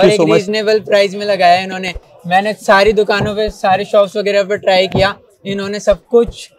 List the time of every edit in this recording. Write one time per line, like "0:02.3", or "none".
none